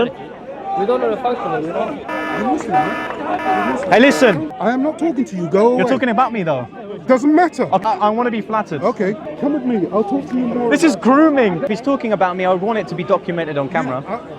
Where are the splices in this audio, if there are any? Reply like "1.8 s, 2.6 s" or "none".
4.5 s, 7.8 s, 9.3 s, 11.7 s